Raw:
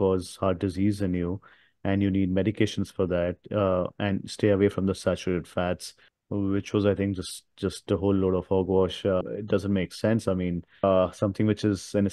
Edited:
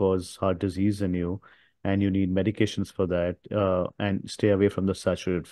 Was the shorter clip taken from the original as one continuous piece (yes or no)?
yes